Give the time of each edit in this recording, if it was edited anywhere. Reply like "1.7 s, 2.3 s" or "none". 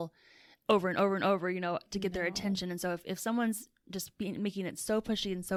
none